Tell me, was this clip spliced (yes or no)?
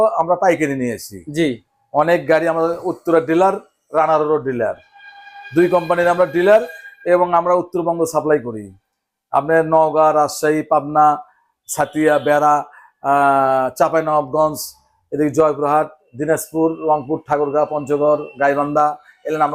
no